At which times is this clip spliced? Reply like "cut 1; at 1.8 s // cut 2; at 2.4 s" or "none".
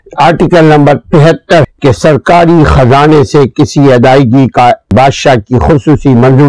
cut 1; at 1.7 s // cut 2; at 4.9 s